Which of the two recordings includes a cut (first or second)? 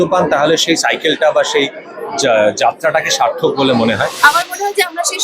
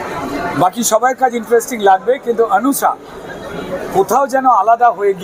first